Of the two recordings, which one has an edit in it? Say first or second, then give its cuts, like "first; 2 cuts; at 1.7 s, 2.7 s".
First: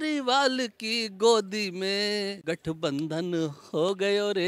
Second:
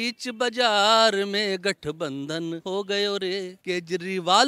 second; 2 cuts; at 2.6 s, 3.5 s